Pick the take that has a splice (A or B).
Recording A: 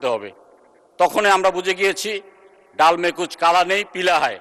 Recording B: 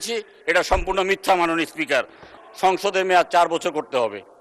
B